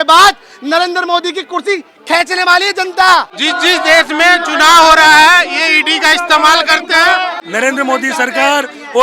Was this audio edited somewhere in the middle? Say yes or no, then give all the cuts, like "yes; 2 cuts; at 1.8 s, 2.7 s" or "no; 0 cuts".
yes; 2 cuts; at 3.4 s, 7.4 s